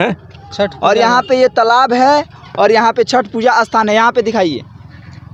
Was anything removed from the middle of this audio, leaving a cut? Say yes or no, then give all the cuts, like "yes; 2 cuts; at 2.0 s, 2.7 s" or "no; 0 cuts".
no; 0 cuts